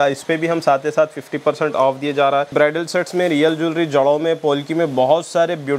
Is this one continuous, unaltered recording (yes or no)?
no